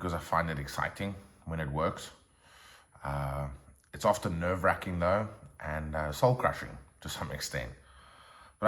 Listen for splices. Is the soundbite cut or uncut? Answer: uncut